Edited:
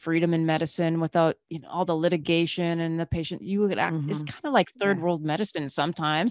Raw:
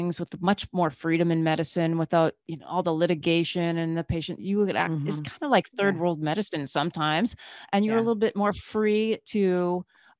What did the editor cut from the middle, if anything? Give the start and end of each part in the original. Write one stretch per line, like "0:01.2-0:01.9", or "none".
none